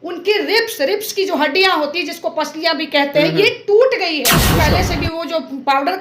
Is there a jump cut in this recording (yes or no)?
yes